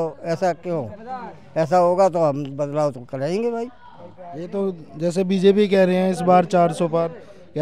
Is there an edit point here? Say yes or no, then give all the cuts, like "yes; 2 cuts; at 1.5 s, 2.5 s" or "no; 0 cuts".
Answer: no; 0 cuts